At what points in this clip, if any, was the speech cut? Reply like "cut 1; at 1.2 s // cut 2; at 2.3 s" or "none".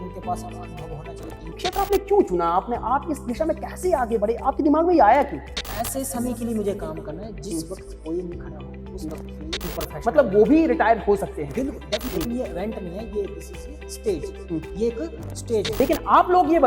cut 1; at 1.6 s // cut 2; at 5.6 s // cut 3; at 9.7 s // cut 4; at 12.1 s // cut 5; at 15.8 s